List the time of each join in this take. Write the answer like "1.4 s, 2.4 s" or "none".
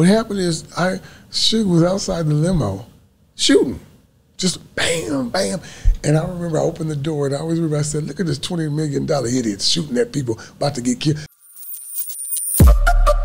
11.3 s